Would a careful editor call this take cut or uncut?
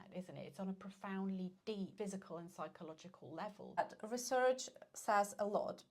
cut